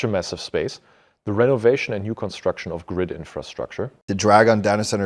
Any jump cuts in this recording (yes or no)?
yes